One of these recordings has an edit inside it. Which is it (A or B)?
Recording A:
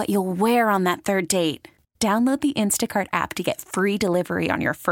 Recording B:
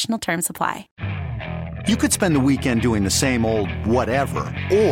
B